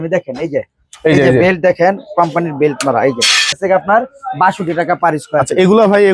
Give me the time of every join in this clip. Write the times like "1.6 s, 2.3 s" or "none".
3.6 s